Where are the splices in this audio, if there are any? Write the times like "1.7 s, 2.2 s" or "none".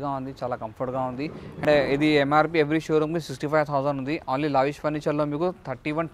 1.6 s